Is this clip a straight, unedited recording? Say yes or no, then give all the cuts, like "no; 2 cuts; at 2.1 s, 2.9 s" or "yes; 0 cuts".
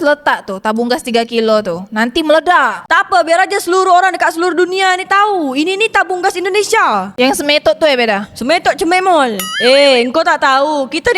no; 1 cut; at 9.5 s